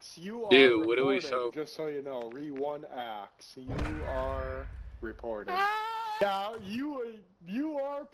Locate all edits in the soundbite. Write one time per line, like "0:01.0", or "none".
0:06.2